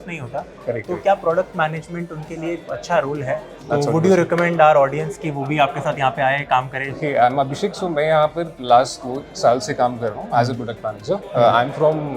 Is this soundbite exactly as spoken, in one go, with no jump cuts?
yes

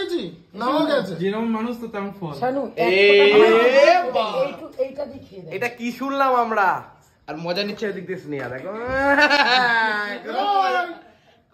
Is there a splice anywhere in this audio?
no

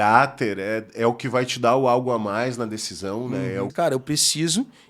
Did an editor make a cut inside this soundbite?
yes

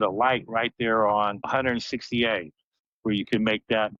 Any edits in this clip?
no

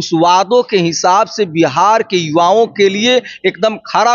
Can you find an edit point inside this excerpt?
no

